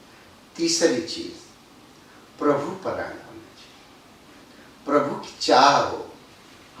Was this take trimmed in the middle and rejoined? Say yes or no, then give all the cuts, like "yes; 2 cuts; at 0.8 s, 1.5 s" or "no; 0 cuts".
no; 0 cuts